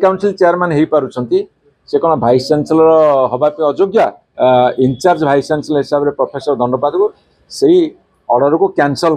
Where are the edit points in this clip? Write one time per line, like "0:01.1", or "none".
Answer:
0:04.2